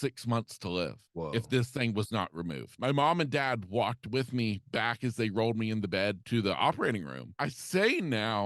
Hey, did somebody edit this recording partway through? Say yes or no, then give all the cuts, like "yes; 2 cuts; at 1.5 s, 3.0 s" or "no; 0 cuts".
yes; 4 cuts; at 1.0 s, 2.7 s, 6.2 s, 7.2 s